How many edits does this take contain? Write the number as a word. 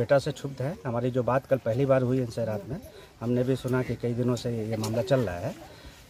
zero